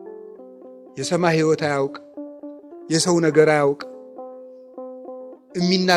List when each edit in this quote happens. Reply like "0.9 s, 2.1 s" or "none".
0.9 s